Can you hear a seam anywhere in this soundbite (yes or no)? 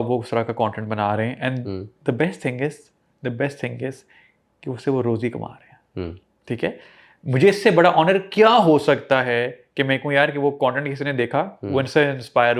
no